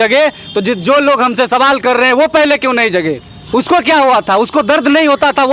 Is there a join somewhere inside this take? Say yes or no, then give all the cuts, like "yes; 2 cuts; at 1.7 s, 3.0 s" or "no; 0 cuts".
yes; 1 cut; at 3.3 s